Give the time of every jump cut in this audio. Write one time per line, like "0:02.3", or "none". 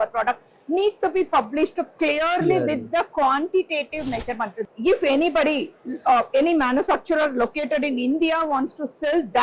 0:04.6